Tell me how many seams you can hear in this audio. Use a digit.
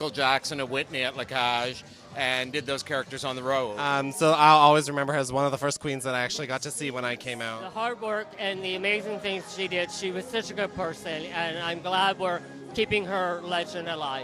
2